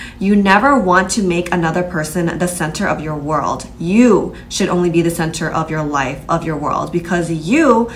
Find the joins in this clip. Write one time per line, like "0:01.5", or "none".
none